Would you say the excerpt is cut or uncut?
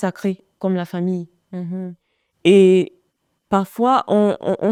uncut